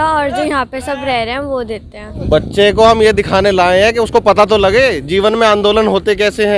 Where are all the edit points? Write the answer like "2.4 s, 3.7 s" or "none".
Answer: 2.2 s